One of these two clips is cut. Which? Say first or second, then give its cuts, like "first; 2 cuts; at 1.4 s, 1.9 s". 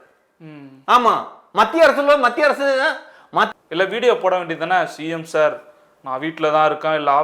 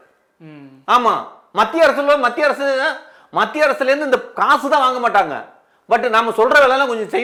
first; 1 cut; at 3.5 s